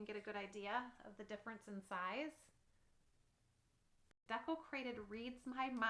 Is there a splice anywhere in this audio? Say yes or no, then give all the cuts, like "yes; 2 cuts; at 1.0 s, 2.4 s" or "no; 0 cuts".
yes; 1 cut; at 4.1 s